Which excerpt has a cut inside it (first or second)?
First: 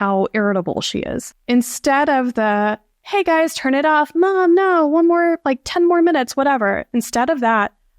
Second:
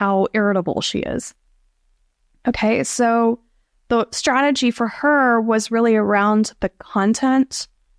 first